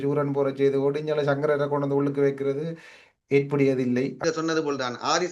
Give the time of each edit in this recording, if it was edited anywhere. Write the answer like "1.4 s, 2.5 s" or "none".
4.2 s